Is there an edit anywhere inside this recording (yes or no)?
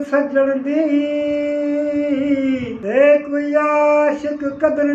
yes